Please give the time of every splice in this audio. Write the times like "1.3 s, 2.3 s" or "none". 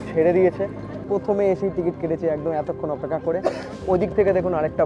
1.0 s